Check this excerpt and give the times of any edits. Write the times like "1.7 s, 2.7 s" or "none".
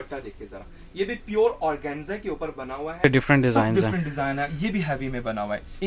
3.0 s